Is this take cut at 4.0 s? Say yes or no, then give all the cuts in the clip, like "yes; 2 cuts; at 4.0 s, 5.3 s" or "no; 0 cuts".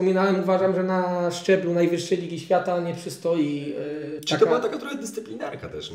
yes; 1 cut; at 4.0 s